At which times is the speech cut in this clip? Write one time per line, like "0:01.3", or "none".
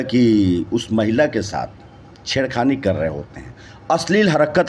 none